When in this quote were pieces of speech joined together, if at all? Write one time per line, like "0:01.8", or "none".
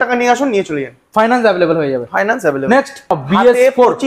0:03.1